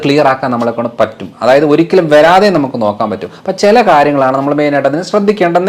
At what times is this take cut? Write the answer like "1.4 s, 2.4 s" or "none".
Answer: none